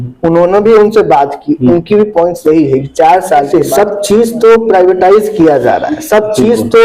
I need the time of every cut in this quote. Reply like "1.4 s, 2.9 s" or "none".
3.5 s